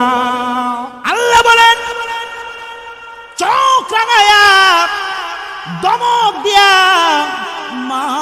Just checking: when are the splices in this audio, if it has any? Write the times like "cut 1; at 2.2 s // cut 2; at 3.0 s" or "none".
cut 1; at 0.9 s